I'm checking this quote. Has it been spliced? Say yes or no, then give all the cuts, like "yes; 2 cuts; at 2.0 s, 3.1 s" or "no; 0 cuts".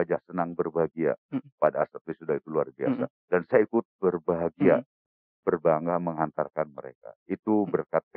no; 0 cuts